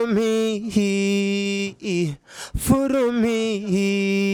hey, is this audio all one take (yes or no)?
yes